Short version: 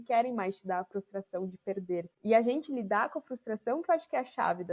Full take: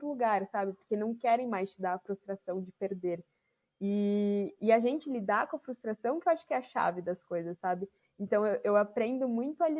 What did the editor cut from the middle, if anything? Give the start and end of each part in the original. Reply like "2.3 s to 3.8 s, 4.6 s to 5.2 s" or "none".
3.3 s to 4.5 s